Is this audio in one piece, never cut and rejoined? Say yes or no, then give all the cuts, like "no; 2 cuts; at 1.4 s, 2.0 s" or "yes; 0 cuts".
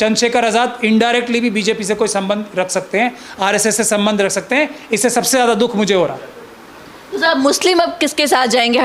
yes; 0 cuts